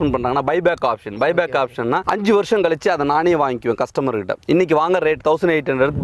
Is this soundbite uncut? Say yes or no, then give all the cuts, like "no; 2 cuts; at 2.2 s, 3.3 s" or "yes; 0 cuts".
no; 1 cut; at 2.0 s